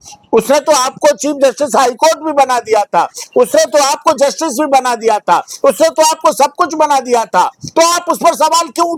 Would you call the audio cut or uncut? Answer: uncut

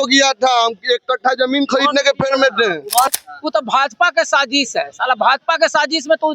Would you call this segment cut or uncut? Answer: cut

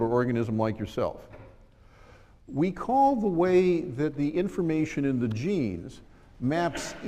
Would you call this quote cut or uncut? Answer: cut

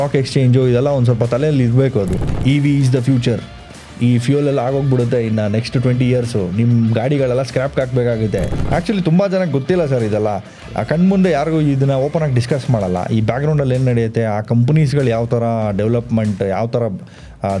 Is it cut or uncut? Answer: cut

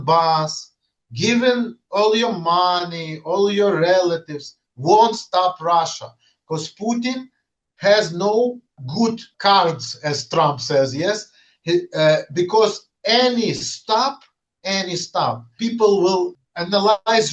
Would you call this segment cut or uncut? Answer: cut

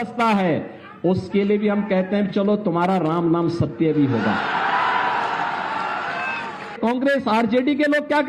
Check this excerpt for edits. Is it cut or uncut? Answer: cut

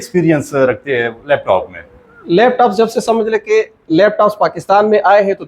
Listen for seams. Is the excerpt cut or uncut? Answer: uncut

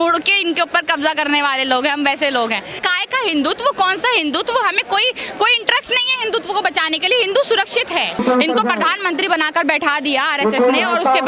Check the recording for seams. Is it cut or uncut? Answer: cut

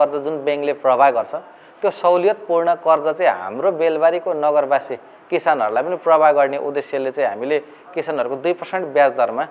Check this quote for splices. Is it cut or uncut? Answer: uncut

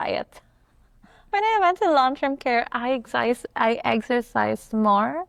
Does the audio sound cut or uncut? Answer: uncut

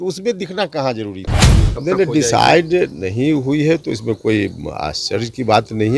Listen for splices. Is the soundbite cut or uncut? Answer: cut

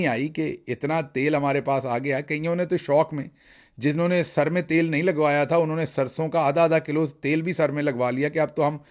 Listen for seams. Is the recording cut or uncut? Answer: uncut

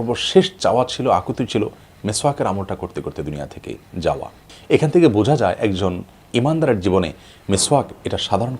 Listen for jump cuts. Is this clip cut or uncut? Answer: cut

